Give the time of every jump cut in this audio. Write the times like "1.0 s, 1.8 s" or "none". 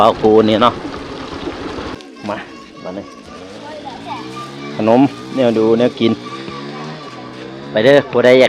1.9 s